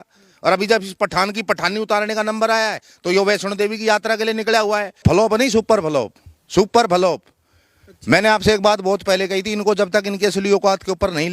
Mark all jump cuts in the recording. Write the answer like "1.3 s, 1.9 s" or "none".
5.0 s